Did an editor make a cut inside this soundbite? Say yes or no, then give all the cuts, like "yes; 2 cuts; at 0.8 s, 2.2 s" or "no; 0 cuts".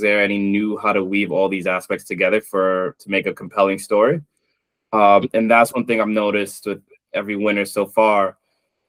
no; 0 cuts